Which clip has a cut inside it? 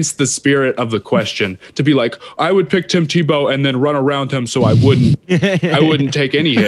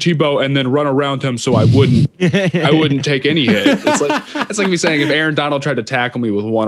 second; 1 cut; at 4.5 s

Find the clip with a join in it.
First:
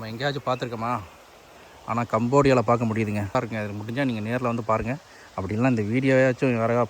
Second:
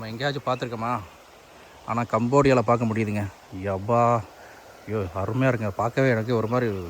first; 1 cut; at 3.4 s

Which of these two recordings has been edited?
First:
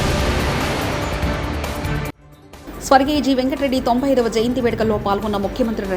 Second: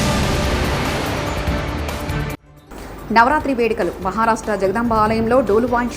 second; 1 cut; at 2.5 s

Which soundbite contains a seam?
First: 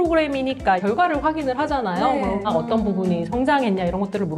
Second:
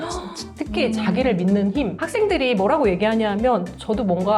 first; 1 cut; at 2.5 s

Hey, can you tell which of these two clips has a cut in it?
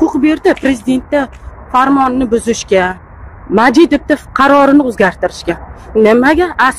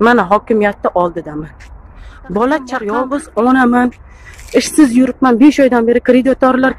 second; 1 cut; at 2.9 s

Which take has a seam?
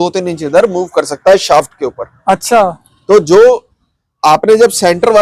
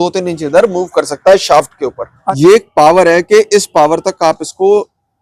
second; 1 cut; at 2.2 s

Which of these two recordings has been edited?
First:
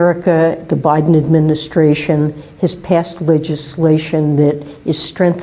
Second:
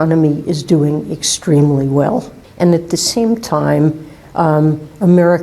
second; 1 cut; at 2.4 s

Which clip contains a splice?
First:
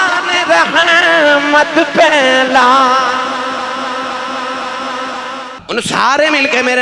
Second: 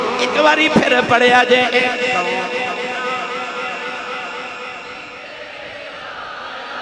first; 1 cut; at 5.6 s

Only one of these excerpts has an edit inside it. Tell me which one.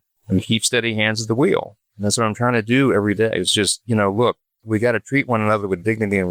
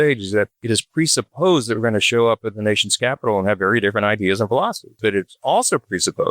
second; 1 cut; at 5.0 s

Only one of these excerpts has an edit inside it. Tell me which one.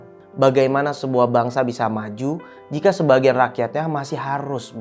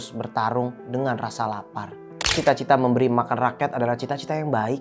second; 1 cut; at 2.4 s

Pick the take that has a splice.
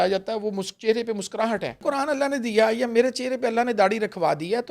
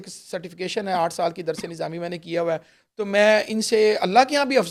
first; 1 cut; at 1.8 s

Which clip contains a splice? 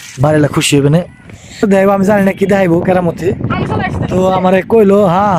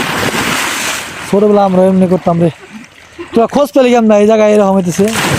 first; 1 cut; at 1.6 s

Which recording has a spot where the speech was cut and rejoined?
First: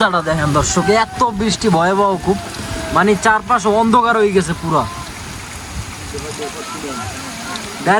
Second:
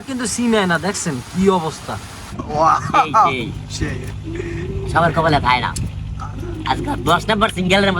second; 1 cut; at 2.4 s

